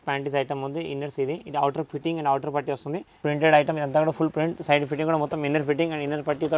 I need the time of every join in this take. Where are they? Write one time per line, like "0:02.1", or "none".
0:03.2